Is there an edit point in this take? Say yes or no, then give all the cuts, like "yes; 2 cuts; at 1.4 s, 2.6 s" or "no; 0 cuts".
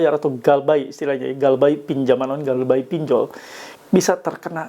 no; 0 cuts